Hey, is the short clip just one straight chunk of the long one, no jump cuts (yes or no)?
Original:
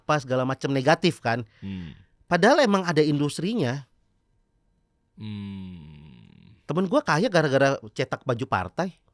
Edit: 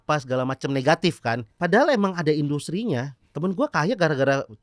no